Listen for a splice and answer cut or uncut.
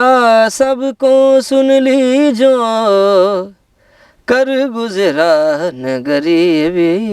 uncut